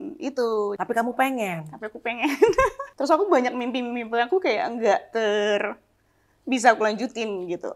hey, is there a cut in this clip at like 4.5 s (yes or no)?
no